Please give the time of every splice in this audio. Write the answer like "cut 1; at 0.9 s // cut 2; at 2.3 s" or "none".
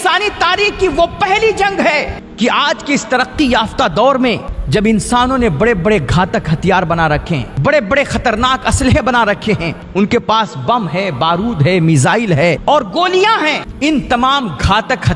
cut 1; at 2.2 s // cut 2; at 4.5 s // cut 3; at 7.5 s // cut 4; at 9.8 s // cut 5; at 12.6 s // cut 6; at 13.7 s